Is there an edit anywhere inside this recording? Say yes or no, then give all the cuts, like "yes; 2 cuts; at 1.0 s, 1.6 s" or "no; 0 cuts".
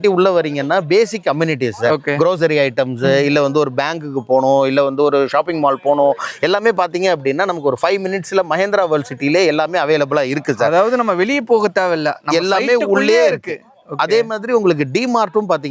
no; 0 cuts